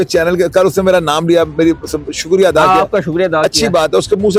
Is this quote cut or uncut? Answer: uncut